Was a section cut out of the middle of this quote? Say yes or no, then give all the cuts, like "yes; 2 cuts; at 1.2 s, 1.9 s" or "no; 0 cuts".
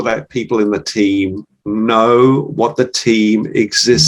no; 0 cuts